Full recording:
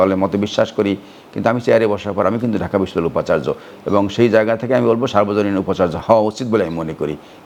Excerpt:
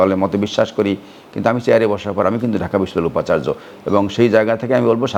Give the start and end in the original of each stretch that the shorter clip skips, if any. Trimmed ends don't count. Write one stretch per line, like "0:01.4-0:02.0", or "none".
none